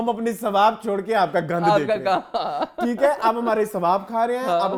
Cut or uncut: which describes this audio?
uncut